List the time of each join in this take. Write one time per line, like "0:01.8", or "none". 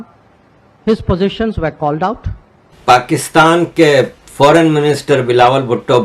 0:02.5